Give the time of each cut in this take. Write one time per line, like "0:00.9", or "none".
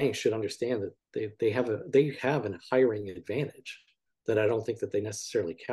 none